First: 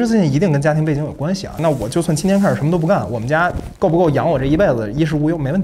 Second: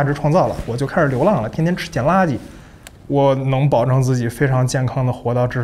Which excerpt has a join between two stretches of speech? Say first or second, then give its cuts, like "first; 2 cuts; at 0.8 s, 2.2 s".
first; 1 cut; at 3.6 s